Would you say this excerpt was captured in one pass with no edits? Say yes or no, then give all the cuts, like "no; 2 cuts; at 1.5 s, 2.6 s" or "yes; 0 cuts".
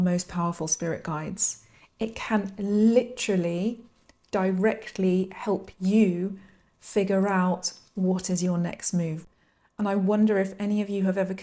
no; 1 cut; at 9.2 s